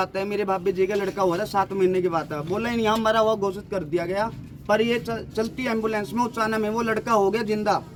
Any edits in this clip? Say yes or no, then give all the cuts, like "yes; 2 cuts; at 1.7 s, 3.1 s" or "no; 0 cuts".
no; 0 cuts